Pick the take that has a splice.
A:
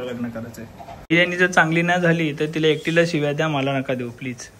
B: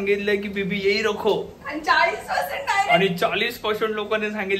A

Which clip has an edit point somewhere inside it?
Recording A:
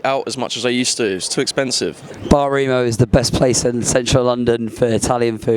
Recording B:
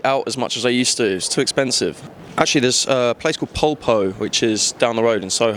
A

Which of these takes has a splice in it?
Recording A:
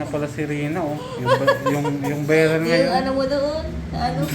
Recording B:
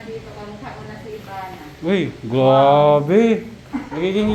A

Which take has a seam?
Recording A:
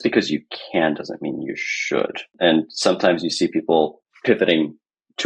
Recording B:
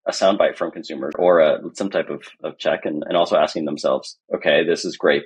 B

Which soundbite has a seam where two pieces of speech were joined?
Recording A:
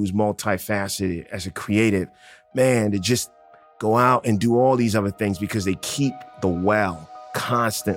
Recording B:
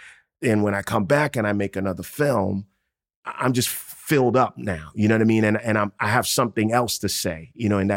B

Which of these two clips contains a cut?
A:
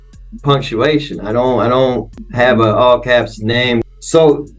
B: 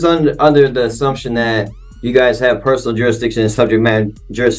A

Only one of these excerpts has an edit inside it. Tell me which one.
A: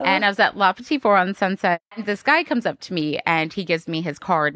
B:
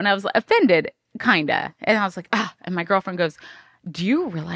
A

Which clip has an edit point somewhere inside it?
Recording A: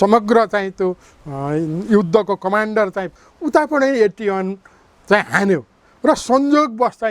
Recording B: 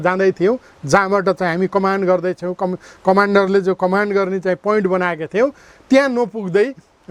A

